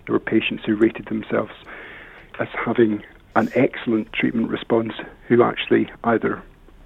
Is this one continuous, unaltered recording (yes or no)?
no